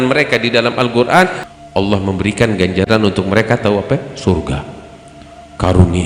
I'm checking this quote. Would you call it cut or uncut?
cut